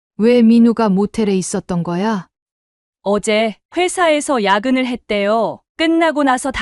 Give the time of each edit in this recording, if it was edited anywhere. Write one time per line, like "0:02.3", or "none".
0:02.3